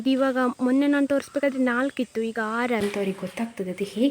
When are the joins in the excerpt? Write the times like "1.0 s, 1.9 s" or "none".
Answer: 2.8 s